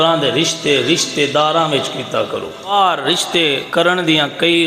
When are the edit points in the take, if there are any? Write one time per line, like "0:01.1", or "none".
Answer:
0:02.7
0:03.6